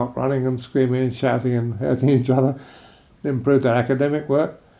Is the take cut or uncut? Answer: cut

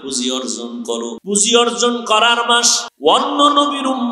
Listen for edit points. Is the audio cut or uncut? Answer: cut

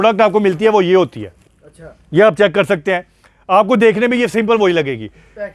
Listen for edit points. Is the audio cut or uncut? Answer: uncut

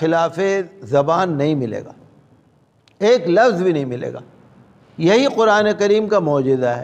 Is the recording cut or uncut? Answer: uncut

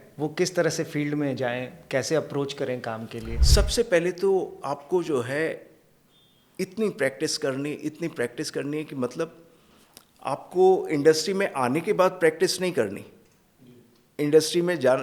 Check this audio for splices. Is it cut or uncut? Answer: uncut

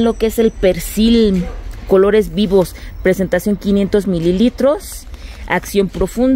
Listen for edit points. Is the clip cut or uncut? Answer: uncut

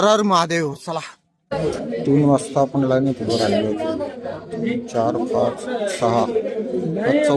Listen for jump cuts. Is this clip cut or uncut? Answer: cut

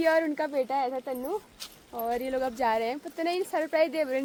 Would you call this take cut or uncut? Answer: uncut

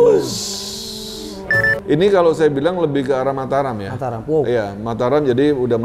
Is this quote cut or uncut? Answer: cut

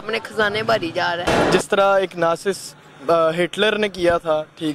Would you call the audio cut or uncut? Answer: cut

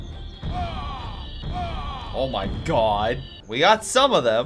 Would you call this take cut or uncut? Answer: cut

